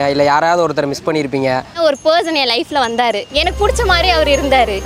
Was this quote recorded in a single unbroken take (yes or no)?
no